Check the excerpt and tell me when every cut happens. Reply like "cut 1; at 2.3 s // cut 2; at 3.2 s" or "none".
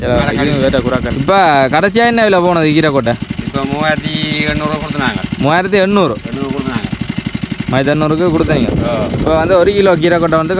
cut 1; at 1.1 s